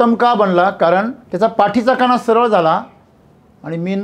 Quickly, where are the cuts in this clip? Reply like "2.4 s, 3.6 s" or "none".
1.2 s